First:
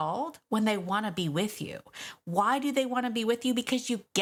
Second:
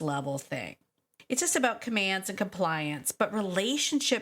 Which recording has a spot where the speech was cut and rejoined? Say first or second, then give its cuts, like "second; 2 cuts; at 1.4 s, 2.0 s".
second; 1 cut; at 1.1 s